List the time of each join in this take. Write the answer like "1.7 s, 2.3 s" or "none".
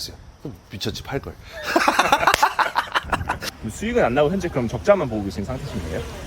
3.5 s